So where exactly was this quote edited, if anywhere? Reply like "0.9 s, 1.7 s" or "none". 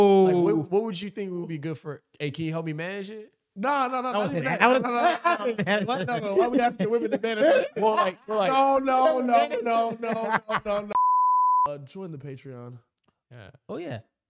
10.9 s